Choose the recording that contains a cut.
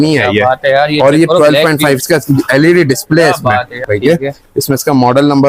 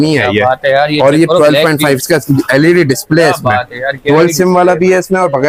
first; 1 cut; at 3.8 s

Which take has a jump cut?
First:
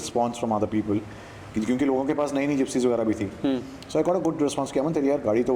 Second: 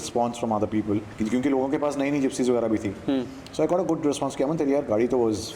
second; 1 cut; at 1.1 s

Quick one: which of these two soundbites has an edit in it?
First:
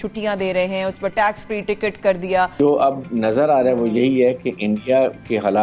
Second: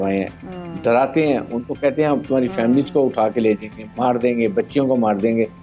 first; 1 cut; at 2.5 s

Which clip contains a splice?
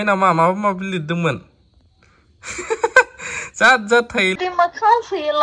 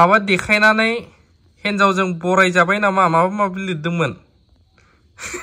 first; 1 cut; at 4.4 s

